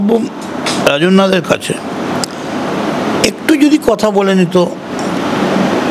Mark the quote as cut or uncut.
uncut